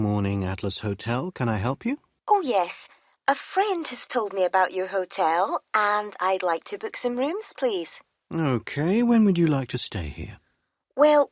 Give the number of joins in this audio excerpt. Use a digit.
1